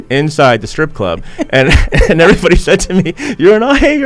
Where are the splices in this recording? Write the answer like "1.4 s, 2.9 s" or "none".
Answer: none